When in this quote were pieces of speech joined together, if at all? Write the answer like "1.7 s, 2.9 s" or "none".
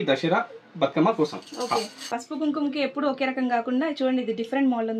2.2 s